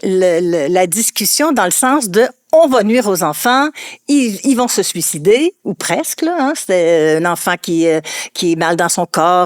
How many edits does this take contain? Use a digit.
0